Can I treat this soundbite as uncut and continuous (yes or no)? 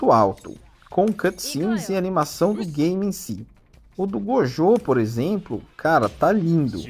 yes